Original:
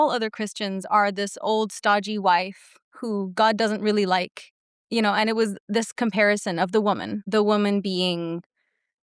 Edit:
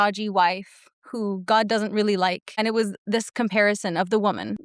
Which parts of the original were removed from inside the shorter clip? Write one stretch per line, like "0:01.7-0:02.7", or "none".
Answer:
0:04.5-0:05.2